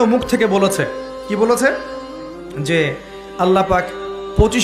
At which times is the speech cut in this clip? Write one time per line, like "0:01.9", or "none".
none